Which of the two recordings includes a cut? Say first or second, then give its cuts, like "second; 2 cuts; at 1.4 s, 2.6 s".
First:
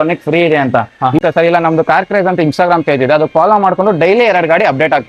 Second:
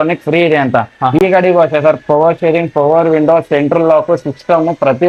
first; 1 cut; at 1.2 s